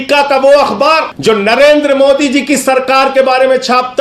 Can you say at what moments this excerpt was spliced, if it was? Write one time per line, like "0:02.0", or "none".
0:01.1